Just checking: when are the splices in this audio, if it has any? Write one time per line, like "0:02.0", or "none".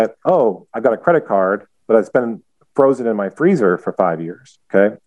none